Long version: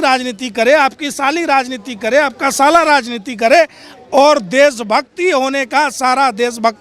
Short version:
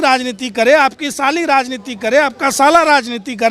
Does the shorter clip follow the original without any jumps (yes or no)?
yes